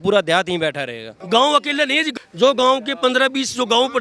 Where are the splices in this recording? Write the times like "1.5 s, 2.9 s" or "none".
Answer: 1.1 s, 2.1 s